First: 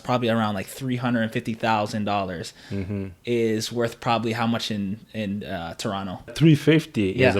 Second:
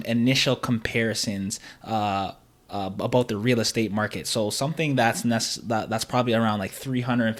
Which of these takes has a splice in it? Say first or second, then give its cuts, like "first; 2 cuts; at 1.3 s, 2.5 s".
first; 1 cut; at 6.3 s